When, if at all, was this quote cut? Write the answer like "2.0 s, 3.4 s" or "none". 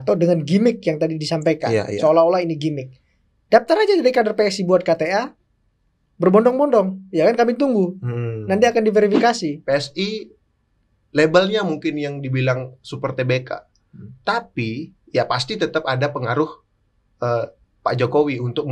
9.6 s

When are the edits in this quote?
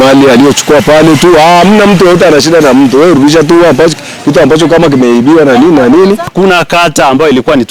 6.3 s

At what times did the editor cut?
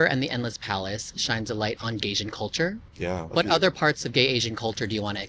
3.2 s

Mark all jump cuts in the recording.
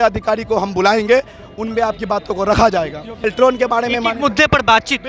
3.2 s

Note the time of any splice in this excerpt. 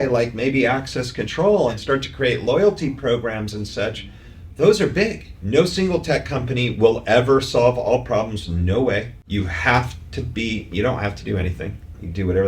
1.8 s, 5.3 s, 9.2 s

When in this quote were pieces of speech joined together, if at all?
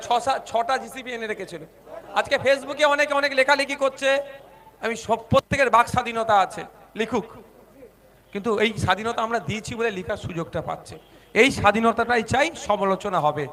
none

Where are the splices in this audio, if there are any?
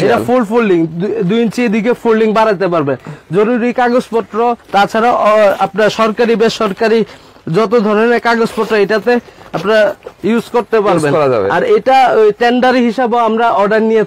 none

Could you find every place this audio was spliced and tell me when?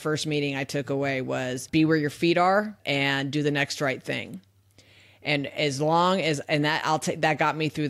none

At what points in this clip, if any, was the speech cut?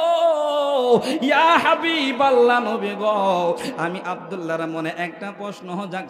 none

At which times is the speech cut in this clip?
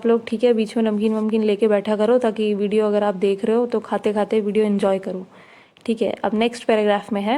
none

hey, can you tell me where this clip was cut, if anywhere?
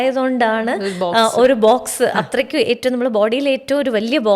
none

